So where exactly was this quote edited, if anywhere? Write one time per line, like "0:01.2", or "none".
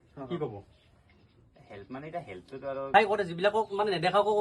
0:02.9